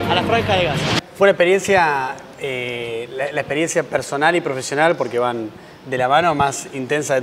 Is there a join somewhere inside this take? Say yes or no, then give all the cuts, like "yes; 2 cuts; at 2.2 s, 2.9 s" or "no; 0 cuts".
no; 0 cuts